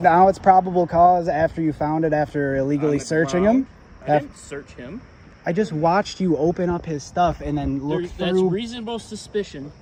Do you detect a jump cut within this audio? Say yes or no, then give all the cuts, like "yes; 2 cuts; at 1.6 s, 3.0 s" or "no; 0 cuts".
no; 0 cuts